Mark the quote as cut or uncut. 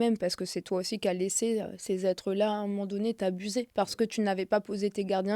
cut